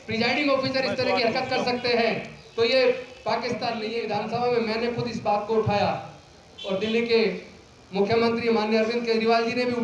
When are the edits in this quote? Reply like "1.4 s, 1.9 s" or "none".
3.9 s